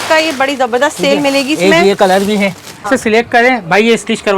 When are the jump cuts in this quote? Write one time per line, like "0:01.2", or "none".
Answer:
0:02.9